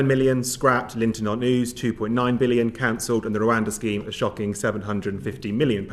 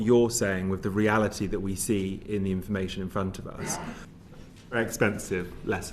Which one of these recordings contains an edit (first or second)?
second